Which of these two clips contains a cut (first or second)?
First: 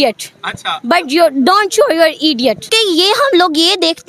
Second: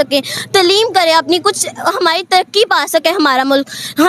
first